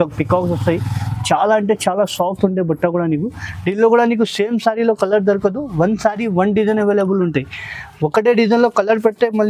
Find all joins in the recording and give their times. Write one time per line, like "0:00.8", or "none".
none